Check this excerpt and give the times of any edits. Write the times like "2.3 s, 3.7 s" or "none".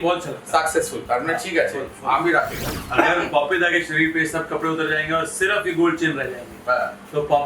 2.6 s